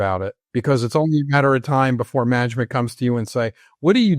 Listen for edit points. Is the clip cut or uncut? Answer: cut